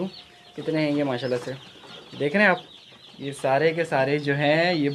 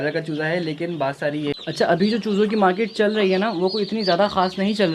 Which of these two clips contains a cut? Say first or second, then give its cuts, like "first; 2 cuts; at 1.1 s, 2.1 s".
second; 1 cut; at 1.5 s